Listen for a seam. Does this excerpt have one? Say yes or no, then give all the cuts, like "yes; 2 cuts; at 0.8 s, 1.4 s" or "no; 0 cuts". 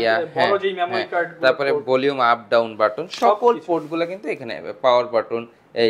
no; 0 cuts